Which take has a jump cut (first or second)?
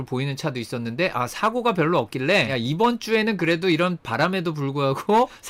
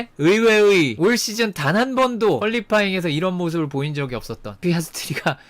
second